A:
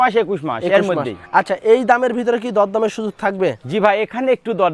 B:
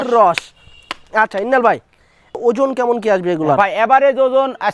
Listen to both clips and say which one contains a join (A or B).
B